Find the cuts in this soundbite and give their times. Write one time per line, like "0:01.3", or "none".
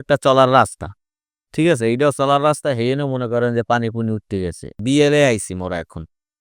0:04.7